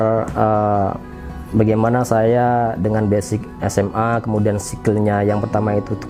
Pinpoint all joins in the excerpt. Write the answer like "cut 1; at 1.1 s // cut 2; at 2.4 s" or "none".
none